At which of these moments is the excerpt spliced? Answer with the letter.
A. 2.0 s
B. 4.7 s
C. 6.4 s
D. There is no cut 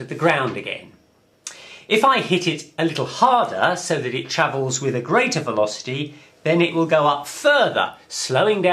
B